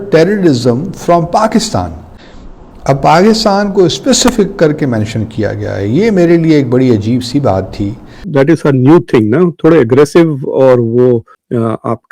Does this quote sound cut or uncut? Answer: cut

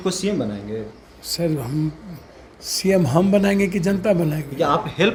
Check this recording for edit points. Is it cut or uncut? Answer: uncut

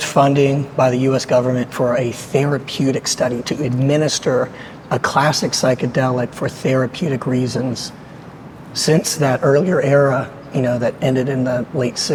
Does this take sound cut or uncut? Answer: uncut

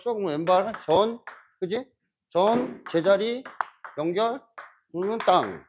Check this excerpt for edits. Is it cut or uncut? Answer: uncut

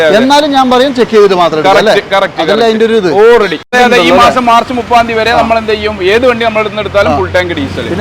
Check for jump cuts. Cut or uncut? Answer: cut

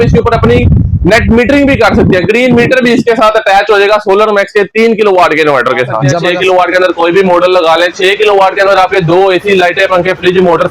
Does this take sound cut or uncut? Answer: cut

